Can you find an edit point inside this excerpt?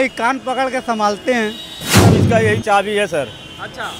yes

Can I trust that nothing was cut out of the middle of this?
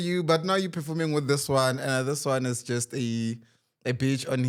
yes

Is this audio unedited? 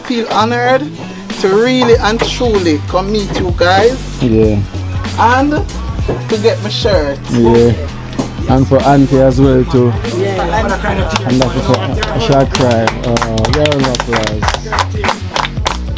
yes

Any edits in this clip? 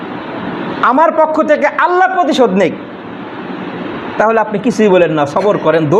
no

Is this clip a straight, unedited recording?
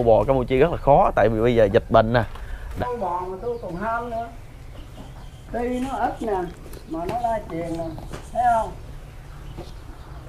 no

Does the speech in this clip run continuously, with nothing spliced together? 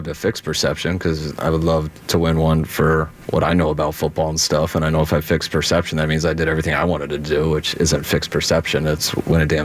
no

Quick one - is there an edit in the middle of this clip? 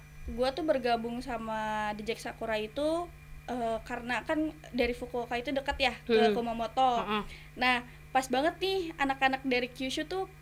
no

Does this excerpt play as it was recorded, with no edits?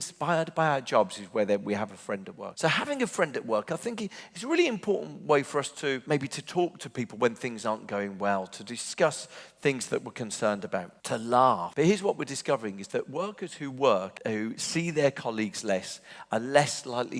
no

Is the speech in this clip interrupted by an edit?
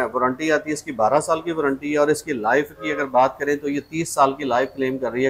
no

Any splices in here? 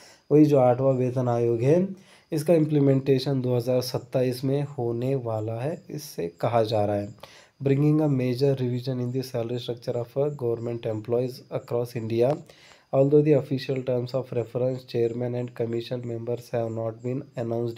yes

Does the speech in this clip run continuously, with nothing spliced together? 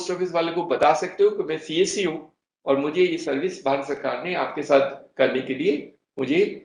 yes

